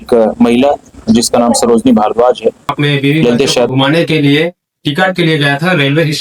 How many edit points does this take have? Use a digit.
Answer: 1